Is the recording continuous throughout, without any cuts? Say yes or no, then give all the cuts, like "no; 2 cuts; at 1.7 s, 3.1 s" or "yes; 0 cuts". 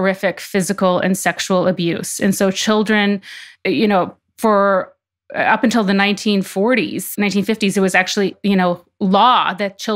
no; 1 cut; at 8.3 s